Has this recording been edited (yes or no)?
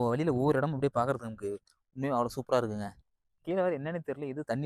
no